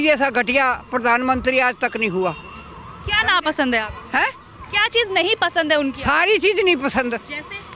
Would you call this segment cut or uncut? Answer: uncut